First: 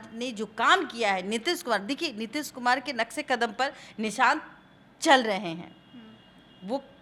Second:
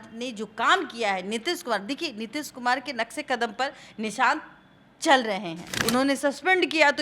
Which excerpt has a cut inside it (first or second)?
second